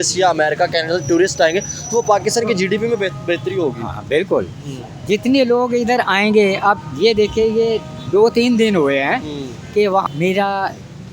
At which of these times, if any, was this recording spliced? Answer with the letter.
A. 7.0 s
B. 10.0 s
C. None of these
B